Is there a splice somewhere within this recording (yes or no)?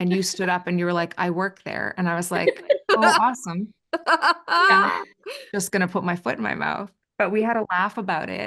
no